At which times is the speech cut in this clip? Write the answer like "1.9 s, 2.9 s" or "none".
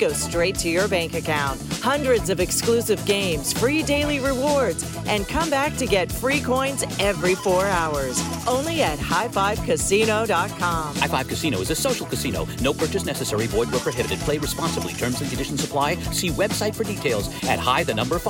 none